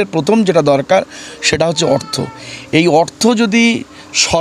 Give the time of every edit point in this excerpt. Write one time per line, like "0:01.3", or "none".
none